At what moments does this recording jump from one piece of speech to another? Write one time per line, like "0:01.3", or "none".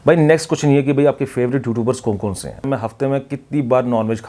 0:02.7